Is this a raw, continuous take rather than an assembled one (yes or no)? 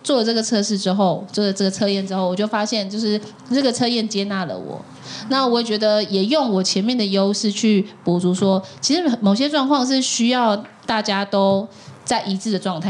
yes